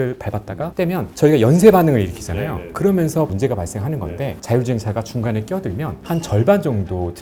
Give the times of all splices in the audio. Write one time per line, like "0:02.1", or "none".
none